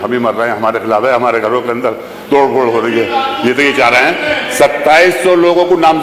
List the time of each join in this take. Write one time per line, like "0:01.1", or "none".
none